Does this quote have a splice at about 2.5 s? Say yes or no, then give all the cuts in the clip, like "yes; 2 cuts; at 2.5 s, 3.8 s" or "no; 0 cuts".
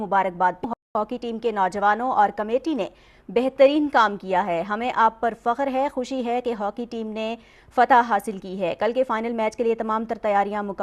no; 1 cut; at 0.9 s